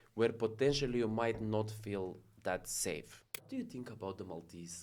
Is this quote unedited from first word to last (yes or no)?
no